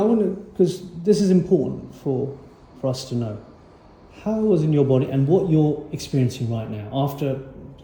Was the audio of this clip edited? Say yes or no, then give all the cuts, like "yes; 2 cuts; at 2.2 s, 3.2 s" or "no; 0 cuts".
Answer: no; 0 cuts